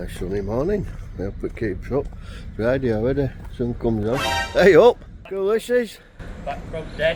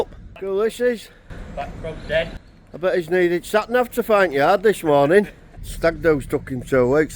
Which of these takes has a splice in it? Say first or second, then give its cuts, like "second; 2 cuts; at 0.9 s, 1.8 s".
second; 1 cut; at 5.6 s